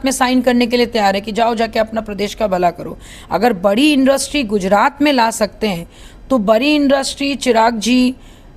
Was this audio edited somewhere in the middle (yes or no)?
no